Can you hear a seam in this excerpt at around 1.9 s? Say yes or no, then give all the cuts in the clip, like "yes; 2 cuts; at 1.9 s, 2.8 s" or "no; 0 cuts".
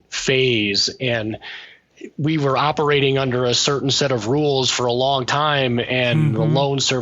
yes; 1 cut; at 1.9 s